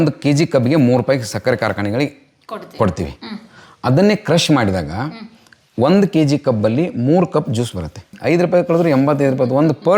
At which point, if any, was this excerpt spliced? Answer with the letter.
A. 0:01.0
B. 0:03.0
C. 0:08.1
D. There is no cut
C